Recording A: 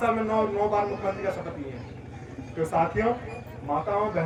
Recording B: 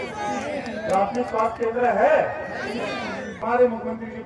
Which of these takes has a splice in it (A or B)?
B